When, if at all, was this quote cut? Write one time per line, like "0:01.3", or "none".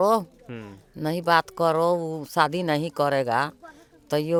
none